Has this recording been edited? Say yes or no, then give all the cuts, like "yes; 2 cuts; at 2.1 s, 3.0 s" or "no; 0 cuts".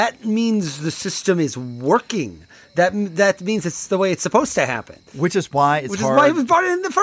no; 0 cuts